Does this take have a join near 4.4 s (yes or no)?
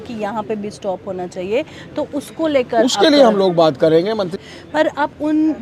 yes